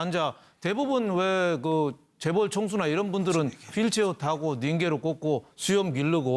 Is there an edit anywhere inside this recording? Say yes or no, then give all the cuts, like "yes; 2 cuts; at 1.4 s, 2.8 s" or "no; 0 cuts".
yes; 1 cut; at 2.3 s